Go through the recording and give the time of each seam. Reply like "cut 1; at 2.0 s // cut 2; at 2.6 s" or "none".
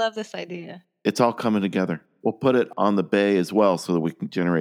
cut 1; at 0.9 s